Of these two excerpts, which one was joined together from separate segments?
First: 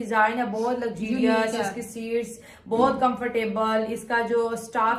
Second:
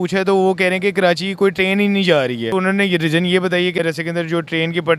second; 2 cuts; at 2.5 s, 3.8 s

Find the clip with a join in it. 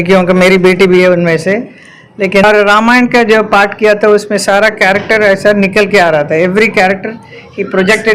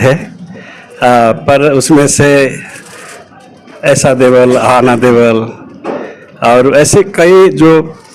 first; 1 cut; at 2.4 s

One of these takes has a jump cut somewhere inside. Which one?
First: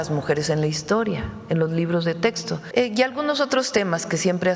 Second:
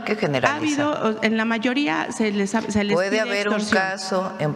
first; 1 cut; at 2.6 s

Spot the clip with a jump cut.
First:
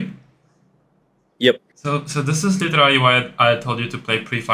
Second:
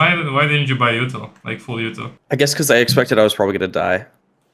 second; 1 cut; at 2.1 s

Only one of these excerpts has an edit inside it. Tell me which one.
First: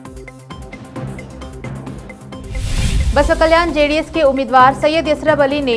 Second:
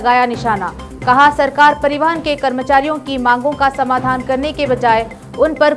first; 1 cut; at 2.2 s

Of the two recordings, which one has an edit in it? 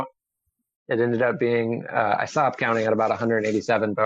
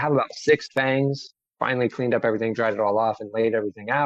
second; 1 cut; at 1.5 s

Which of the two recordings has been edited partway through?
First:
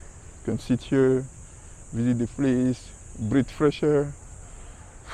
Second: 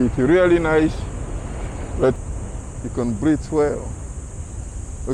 second; 1 cut; at 2.2 s

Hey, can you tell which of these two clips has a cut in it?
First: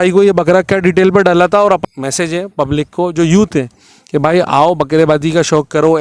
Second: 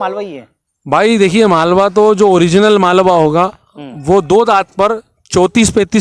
first; 1 cut; at 1.8 s

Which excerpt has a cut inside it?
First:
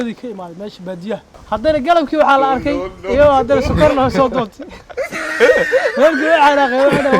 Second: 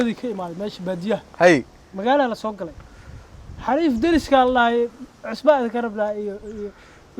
first; 1 cut; at 1.3 s

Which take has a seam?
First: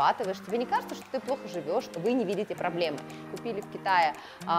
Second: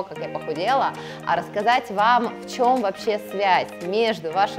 first; 2 cuts; at 1.9 s, 3.2 s

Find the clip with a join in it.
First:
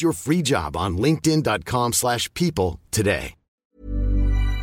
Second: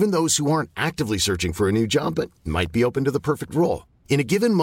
first; 1 cut; at 3.6 s

